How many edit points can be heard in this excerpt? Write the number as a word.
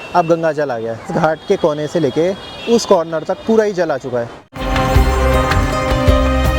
zero